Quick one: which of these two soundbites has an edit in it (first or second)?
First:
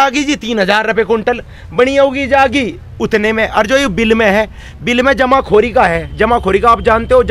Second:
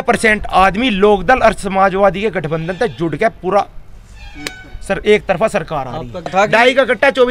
second